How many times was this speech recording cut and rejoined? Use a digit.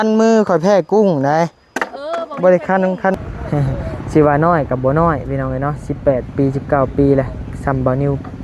1